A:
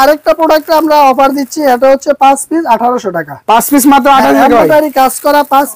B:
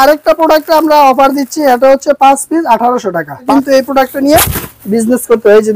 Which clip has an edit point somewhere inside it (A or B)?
B